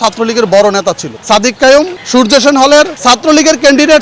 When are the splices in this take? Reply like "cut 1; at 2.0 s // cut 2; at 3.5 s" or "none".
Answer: cut 1; at 1.1 s // cut 2; at 2.0 s // cut 3; at 3.0 s